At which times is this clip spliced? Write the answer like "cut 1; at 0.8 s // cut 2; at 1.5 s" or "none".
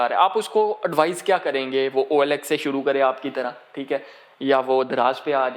none